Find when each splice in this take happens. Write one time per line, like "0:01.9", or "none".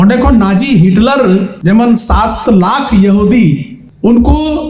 0:01.5